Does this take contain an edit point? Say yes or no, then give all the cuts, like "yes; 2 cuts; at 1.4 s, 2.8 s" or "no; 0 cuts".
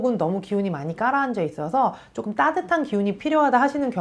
no; 0 cuts